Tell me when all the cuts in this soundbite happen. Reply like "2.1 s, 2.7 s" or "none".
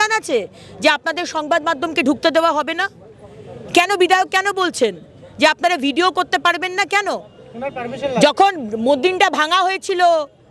none